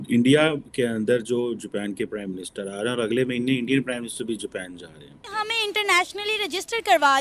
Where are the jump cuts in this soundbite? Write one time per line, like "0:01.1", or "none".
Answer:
0:05.3